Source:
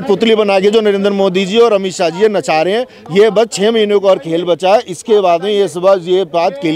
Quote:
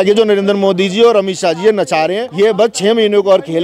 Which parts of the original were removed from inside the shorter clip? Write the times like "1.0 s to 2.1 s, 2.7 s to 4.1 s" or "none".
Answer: 2.8 s to 3.0 s